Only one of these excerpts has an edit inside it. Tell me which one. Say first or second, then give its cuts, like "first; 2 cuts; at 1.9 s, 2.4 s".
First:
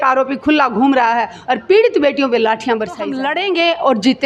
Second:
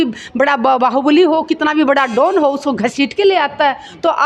first; 1 cut; at 3.2 s